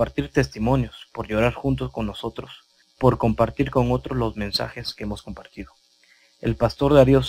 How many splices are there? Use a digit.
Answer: 1